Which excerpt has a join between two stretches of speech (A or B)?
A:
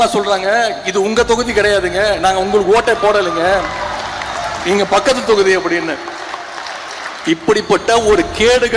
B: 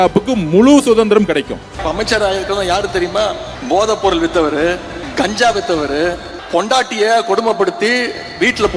B